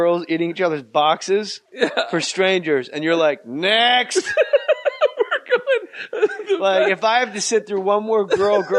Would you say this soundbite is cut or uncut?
uncut